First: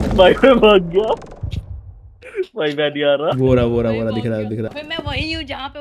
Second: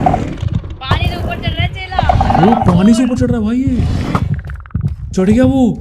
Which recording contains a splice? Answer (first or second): first